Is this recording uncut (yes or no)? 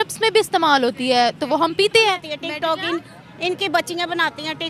no